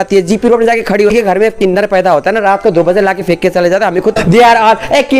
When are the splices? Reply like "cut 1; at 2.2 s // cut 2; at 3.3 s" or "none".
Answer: cut 1; at 1.1 s // cut 2; at 4.2 s